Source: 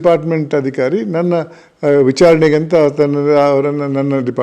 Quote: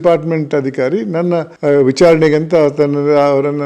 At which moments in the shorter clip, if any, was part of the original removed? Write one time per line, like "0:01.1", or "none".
0:01.5